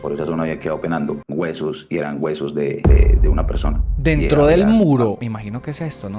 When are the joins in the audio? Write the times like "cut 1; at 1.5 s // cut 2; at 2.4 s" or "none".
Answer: cut 1; at 1.2 s // cut 2; at 5.2 s